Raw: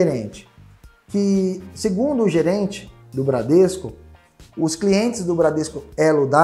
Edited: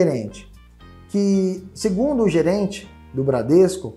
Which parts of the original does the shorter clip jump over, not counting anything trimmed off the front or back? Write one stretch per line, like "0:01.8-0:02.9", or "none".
none